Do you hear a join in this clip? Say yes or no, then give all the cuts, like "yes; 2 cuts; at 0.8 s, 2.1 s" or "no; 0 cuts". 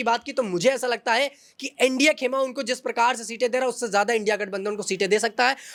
no; 0 cuts